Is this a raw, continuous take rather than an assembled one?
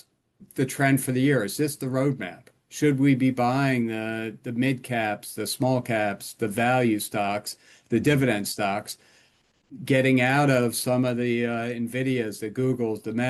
yes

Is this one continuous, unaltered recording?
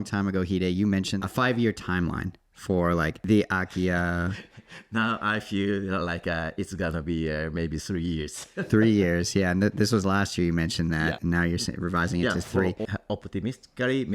no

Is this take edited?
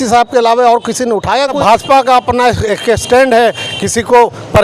yes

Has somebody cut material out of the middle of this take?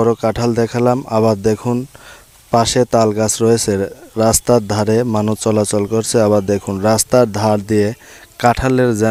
no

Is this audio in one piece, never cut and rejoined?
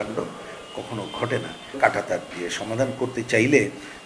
no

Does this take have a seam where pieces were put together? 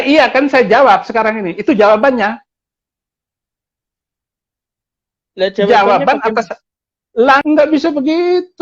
yes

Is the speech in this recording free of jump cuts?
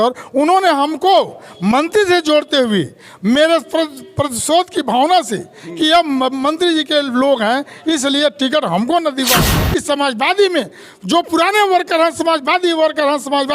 no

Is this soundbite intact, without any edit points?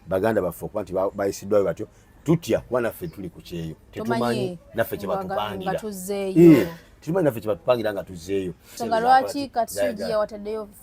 no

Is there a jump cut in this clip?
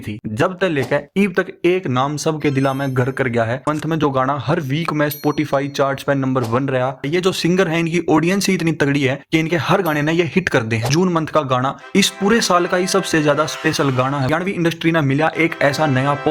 yes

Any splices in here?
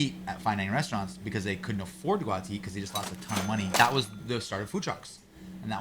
yes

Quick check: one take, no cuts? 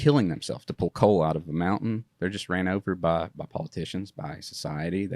no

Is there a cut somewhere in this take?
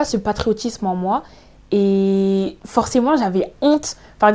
yes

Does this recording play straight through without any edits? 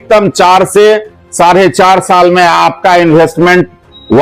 yes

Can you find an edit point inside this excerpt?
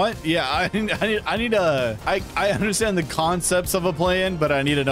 yes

